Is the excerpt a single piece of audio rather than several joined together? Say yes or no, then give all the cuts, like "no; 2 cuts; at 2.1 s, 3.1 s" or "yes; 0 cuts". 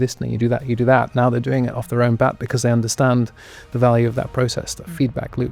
yes; 0 cuts